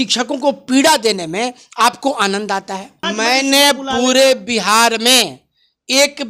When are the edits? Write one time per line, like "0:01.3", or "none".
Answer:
0:03.0